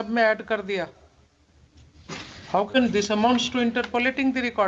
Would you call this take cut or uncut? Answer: uncut